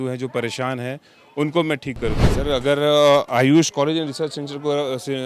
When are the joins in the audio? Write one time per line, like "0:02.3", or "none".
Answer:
0:02.2